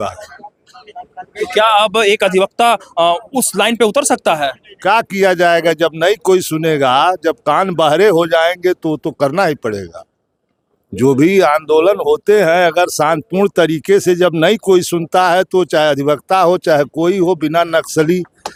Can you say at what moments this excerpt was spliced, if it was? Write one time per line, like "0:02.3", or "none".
none